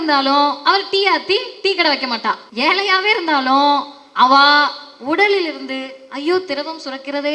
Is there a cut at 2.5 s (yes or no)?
yes